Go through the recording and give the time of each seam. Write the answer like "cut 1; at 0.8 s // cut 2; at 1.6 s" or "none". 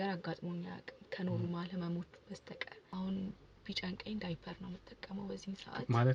cut 1; at 2.8 s